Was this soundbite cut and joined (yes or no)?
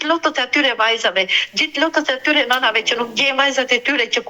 no